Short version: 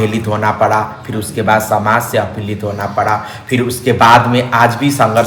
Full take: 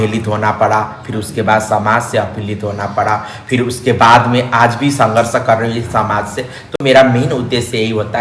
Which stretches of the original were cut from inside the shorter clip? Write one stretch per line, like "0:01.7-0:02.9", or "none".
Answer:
none

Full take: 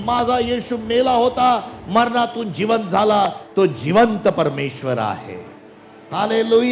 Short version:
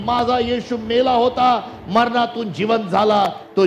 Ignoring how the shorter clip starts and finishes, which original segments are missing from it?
none

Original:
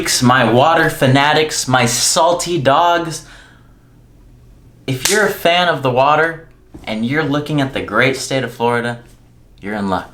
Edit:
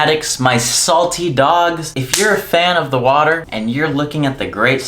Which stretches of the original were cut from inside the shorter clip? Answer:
0:03.2-0:04.9
0:06.4-0:06.8

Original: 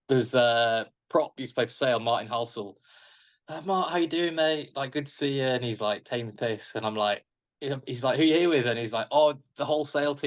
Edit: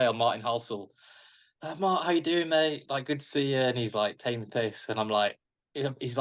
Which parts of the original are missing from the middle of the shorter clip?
none

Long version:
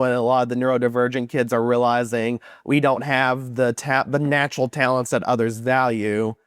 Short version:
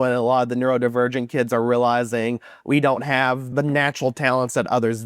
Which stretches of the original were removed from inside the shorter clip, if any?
0:03.5-0:04.1

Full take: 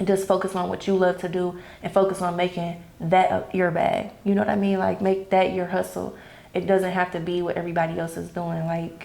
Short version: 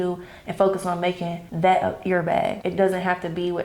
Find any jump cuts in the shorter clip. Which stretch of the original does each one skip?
0:02.8-0:02.9
0:04.1-0:06.5

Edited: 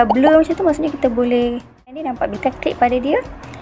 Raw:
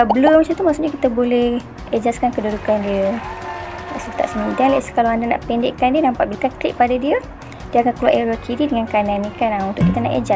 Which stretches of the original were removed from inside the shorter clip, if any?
0:01.9-0:05.9

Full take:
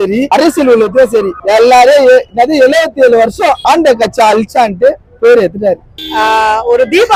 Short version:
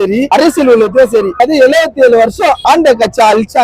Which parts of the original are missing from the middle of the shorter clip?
0:01.3-0:02.3

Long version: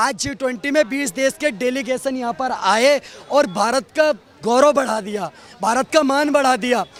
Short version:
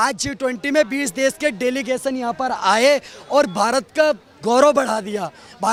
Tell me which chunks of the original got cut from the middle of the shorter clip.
none

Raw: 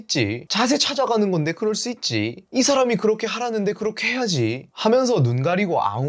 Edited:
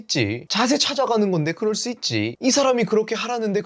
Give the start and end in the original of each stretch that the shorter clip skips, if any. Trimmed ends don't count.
0:02.3-0:02.4

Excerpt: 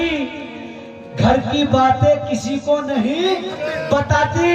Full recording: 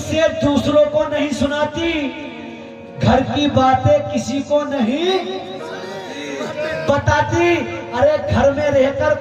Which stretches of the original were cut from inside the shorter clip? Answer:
0:05.4-0:06.5

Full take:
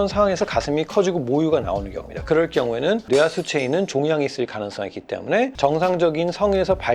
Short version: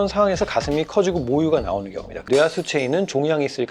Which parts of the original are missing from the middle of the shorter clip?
0:02.2-0:03.0

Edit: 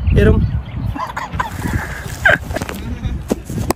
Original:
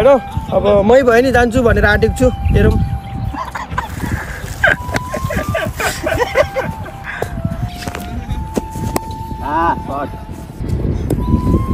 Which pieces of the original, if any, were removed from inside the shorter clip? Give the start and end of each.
0:05.0-0:07.8

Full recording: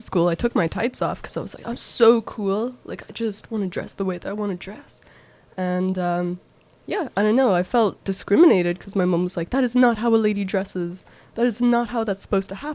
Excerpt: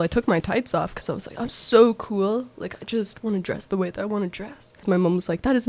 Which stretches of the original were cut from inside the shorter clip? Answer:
0:05.0-0:08.8

